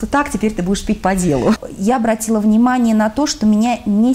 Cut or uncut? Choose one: cut